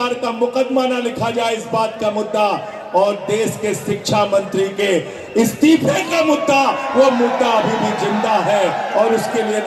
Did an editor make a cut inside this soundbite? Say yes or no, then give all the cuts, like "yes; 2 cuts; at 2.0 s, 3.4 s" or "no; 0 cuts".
no; 0 cuts